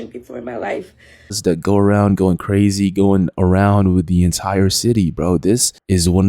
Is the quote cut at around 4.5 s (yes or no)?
no